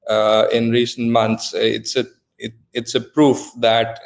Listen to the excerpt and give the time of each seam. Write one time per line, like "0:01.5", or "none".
none